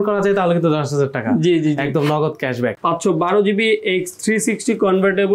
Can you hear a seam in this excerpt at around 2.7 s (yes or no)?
yes